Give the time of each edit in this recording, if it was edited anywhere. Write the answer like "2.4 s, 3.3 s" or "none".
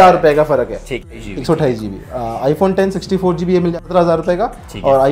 1.1 s, 3.7 s